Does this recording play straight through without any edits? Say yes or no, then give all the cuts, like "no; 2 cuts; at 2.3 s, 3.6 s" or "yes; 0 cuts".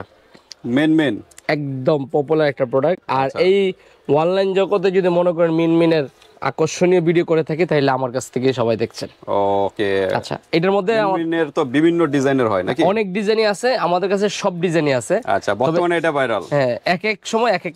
yes; 0 cuts